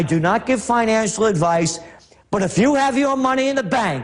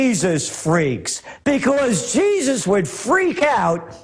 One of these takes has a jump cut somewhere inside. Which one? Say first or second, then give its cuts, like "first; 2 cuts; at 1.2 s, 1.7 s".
first; 1 cut; at 1.4 s